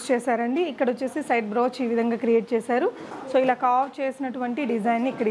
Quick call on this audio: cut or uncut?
cut